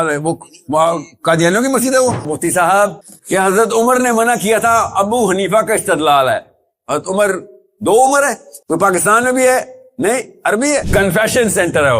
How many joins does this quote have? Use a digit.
2